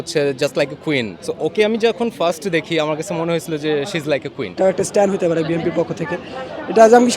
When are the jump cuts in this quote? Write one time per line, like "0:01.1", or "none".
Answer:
0:01.2
0:04.6